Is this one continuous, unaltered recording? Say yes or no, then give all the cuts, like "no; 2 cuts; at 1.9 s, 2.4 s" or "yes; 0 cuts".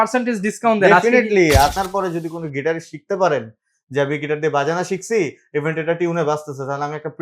no; 1 cut; at 1.8 s